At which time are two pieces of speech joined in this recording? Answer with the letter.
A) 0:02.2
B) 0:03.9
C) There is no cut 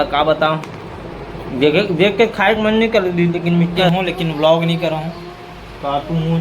B